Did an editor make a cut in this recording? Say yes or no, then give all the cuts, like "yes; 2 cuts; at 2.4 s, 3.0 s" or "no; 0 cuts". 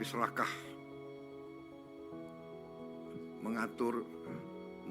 yes; 2 cuts; at 1.2 s, 3.4 s